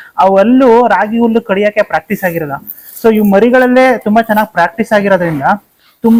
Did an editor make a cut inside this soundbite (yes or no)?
no